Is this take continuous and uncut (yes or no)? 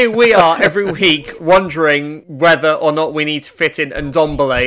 no